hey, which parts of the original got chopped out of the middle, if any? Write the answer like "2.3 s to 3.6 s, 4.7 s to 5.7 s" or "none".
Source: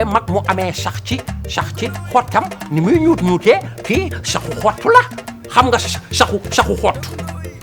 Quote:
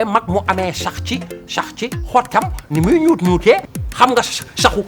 3.7 s to 5.3 s